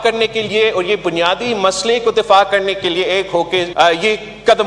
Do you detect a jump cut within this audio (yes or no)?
yes